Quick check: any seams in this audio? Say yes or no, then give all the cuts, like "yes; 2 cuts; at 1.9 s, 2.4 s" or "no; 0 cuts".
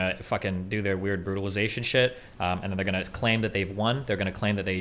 no; 0 cuts